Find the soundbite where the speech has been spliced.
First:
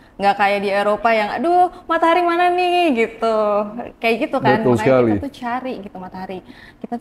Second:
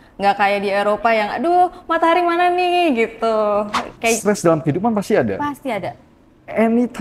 second; 1 cut; at 4.2 s

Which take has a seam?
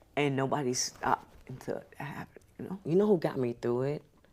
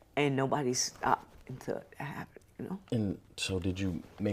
first; 1 cut; at 2.8 s

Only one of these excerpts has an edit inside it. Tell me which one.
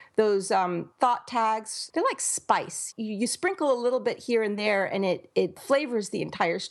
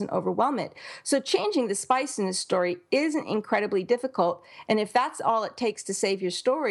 first; 4 cuts; at 0.9 s, 1.8 s, 2.9 s, 5.6 s

